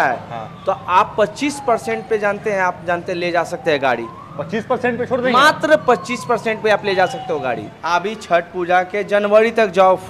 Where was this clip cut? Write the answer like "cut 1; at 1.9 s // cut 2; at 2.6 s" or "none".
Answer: cut 1; at 7.7 s